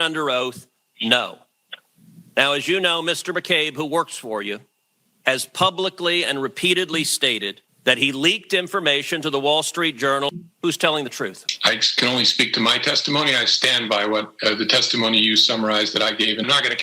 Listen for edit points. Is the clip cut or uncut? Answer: uncut